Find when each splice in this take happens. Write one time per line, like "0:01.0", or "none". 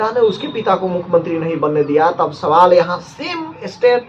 none